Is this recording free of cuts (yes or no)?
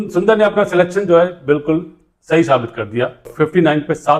no